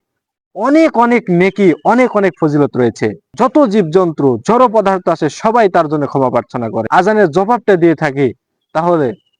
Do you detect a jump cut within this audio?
yes; 2 cuts; at 3.2 s, 6.8 s

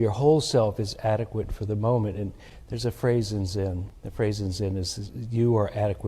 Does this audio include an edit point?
yes; 1 cut; at 4.0 s

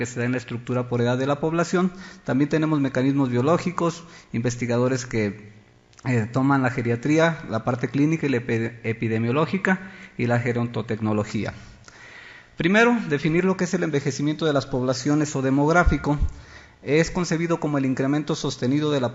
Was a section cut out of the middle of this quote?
no; 0 cuts

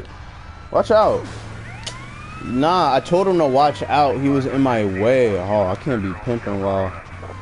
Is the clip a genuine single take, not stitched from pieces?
yes; 0 cuts

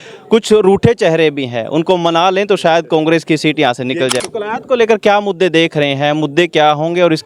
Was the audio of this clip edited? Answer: yes; 1 cut; at 4.1 s

